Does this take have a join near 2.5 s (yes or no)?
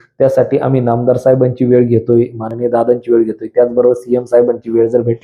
no